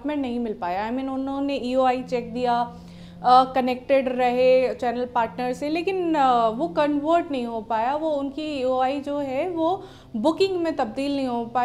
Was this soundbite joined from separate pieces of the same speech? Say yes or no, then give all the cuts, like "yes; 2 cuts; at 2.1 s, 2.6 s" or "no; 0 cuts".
no; 0 cuts